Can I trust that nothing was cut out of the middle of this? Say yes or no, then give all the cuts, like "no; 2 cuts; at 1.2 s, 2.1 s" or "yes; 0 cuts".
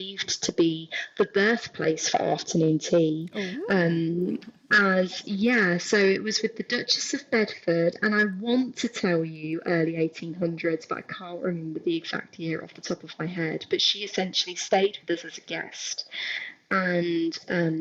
yes; 0 cuts